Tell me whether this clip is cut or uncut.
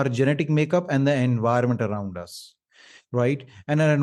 uncut